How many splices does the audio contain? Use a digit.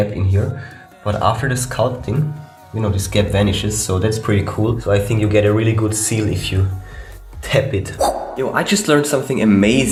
0